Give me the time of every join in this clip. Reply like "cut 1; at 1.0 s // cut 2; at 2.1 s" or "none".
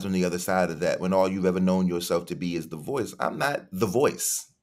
cut 1; at 3.4 s

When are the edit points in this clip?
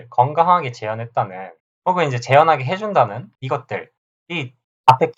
cut 1; at 3.3 s

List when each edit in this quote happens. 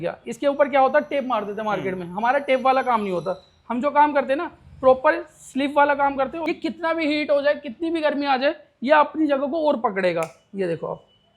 cut 1; at 6.5 s

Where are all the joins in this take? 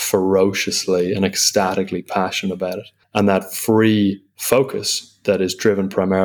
cut 1; at 2.9 s // cut 2; at 4.3 s

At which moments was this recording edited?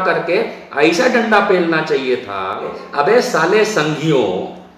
cut 1; at 2.8 s

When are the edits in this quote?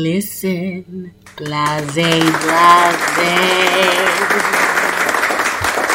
cut 1; at 4.0 s

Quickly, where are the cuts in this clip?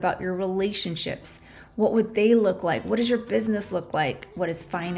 none

